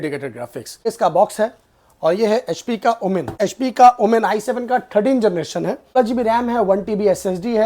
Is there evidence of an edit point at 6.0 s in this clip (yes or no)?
yes